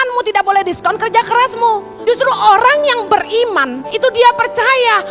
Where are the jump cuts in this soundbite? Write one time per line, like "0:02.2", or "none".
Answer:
0:01.9
0:03.8